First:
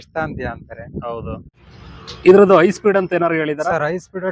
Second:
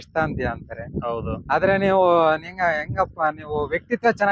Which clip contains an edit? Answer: first; 1 cut; at 1.4 s

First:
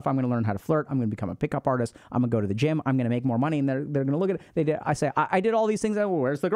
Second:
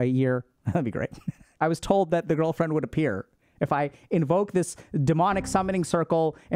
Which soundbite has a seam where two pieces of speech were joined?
second; 1 cut; at 1.4 s

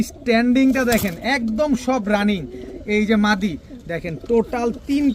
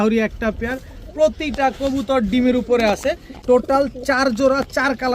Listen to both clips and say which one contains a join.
second; 1 cut; at 3.3 s

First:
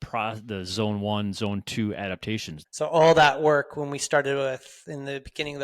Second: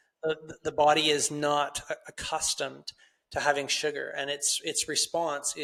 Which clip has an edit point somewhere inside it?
first; 1 cut; at 2.6 s

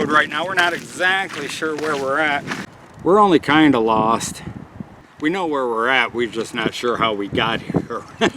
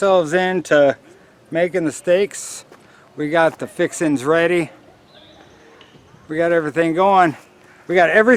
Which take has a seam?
first; 2 cuts; at 2.5 s, 5.0 s

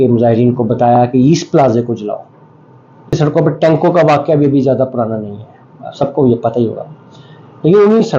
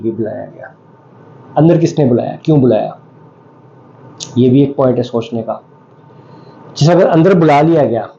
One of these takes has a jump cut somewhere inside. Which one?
first; 1 cut; at 3.1 s

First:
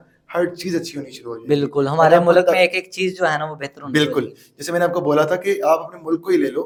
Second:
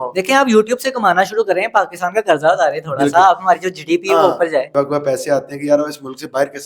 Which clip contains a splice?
second; 1 cut; at 4.7 s

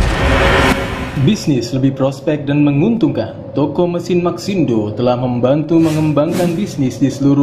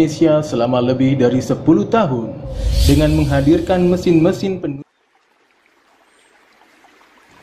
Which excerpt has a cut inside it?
second; 1 cut; at 4.7 s

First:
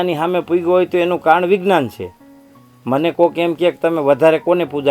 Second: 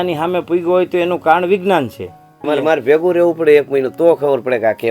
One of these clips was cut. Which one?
second; 1 cut; at 2.5 s

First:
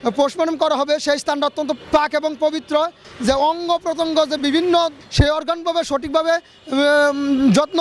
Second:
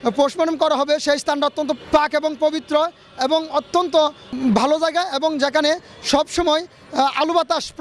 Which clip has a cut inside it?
first; 2 cuts; at 3.0 s, 5.0 s

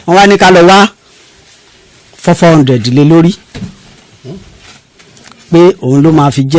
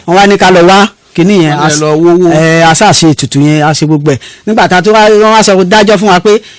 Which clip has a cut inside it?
second; 1 cut; at 1.0 s

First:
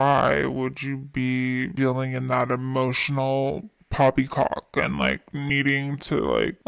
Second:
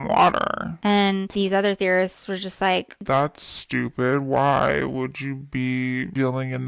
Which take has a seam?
second; 2 cuts; at 1.3 s, 2.9 s

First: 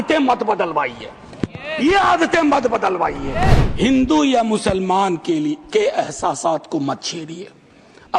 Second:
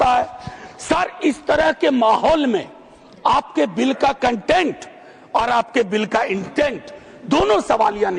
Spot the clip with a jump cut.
first; 1 cut; at 3.6 s

